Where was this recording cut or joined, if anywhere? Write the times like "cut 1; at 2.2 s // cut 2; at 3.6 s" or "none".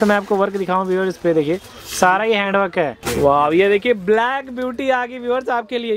cut 1; at 3.0 s